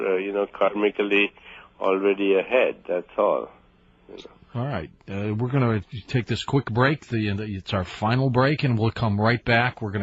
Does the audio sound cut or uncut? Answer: cut